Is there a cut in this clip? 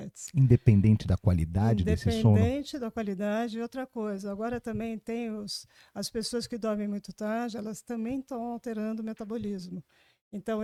no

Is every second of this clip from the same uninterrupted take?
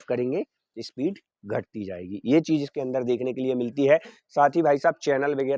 yes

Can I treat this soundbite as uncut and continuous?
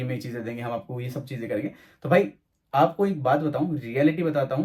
yes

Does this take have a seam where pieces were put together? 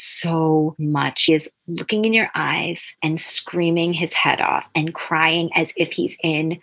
yes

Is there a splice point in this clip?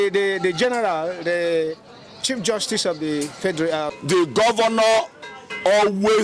yes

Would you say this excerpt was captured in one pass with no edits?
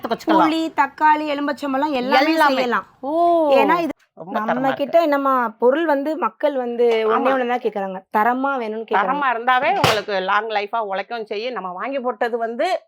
no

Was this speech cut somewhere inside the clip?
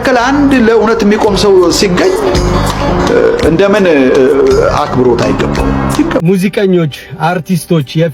yes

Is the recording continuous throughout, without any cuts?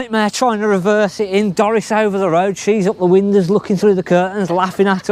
yes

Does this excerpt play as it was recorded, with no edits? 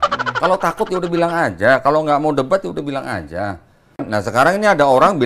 no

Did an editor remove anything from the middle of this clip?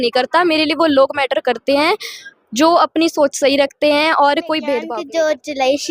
yes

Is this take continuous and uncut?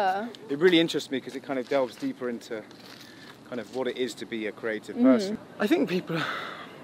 no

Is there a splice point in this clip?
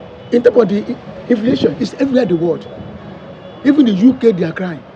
no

